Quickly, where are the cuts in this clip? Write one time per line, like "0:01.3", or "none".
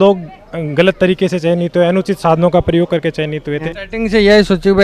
0:03.6